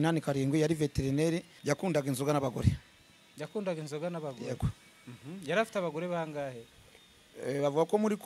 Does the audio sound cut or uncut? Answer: cut